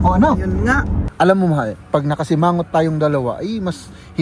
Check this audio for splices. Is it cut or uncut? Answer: cut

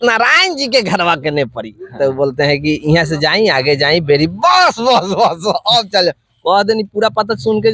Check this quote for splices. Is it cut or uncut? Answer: uncut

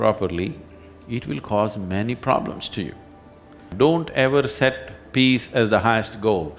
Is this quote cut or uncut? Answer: cut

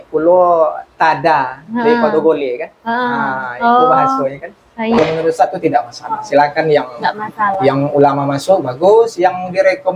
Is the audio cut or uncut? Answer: cut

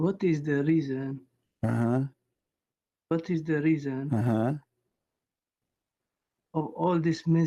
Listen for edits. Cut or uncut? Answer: uncut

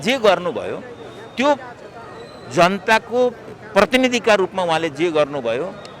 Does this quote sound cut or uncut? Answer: uncut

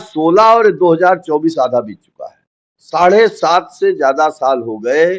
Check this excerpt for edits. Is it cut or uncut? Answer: uncut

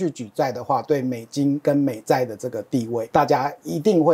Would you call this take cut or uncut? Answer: cut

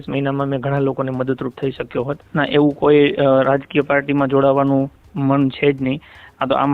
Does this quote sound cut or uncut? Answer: cut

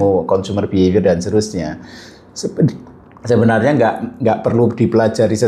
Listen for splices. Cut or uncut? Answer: uncut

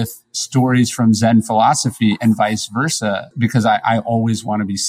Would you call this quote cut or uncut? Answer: cut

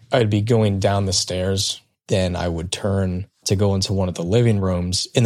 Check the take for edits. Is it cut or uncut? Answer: uncut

